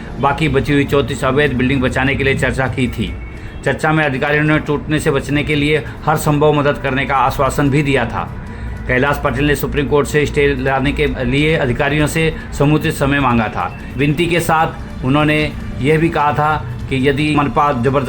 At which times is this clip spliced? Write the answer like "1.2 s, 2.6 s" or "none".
11.2 s, 17.3 s